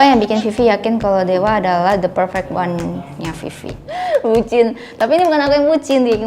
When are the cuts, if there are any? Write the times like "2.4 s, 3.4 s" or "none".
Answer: 3.8 s

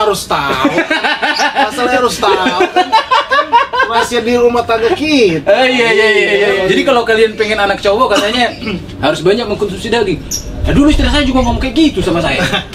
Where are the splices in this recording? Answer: 6.6 s

